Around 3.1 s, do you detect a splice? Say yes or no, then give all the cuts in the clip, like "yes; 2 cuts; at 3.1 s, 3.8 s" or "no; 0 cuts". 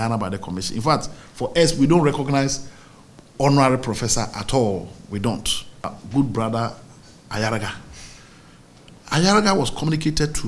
no; 1 cut; at 6.0 s